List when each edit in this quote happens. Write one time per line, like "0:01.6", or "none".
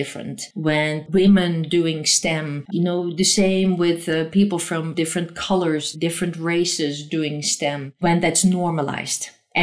0:00.9
0:02.6
0:07.9